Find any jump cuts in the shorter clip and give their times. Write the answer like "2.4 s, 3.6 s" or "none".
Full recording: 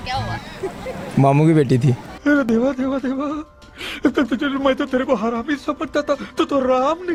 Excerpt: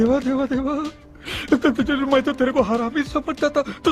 none